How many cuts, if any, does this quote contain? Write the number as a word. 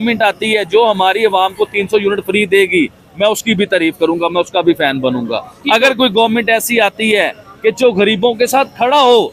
zero